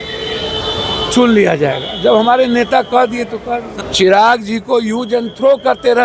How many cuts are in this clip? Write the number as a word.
one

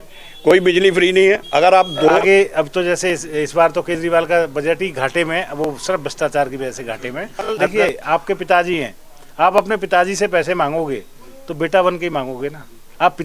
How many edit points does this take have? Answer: two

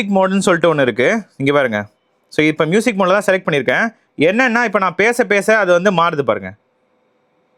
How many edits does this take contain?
zero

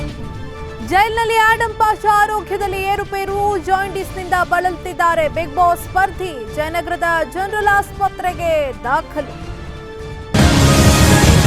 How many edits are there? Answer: one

